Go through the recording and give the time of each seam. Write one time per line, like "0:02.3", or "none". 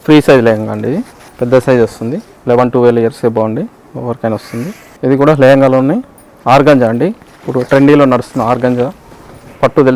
0:01.2
0:02.3
0:04.9